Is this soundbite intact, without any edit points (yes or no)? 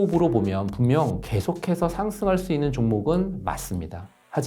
yes